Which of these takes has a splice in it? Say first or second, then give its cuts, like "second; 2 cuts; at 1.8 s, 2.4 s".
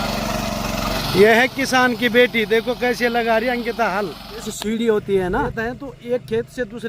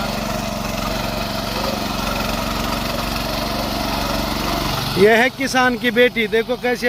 first; 3 cuts; at 1.0 s, 4.5 s, 5.5 s